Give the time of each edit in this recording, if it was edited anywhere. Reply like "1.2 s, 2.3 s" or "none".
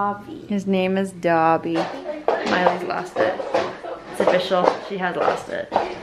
1.7 s